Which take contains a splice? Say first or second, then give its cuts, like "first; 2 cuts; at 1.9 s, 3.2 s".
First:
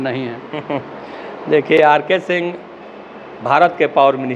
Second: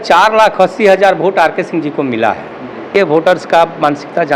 second; 1 cut; at 3.2 s